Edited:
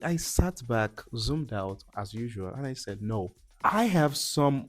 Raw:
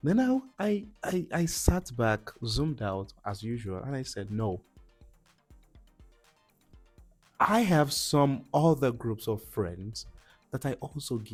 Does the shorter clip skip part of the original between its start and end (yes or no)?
yes